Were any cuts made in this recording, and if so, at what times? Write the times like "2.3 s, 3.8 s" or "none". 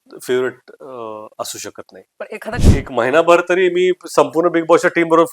2.6 s